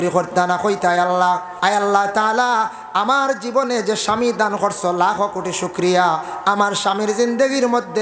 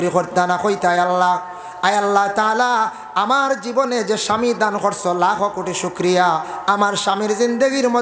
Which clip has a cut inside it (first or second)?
first